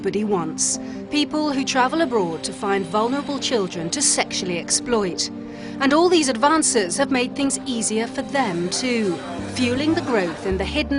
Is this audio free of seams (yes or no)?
no